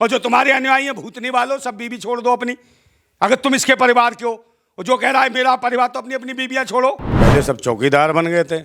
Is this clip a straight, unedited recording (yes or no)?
no